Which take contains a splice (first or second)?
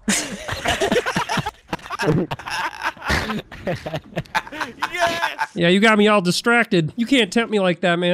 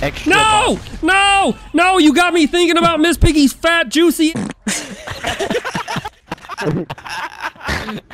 first